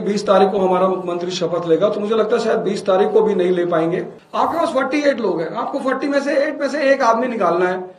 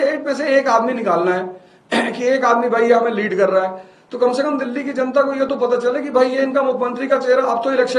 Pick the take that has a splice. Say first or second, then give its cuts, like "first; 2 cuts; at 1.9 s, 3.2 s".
first; 1 cut; at 4.2 s